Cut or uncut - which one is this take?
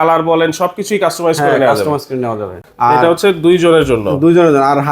cut